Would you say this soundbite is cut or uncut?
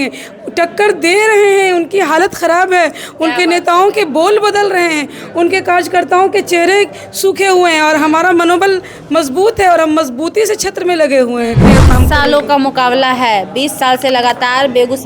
cut